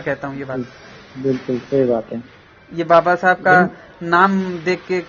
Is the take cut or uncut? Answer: uncut